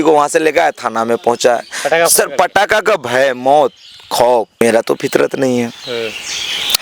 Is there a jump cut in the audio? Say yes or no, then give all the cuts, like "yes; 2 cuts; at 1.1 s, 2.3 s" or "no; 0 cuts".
no; 0 cuts